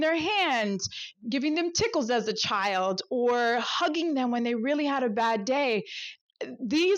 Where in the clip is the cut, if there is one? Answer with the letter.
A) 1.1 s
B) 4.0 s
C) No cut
A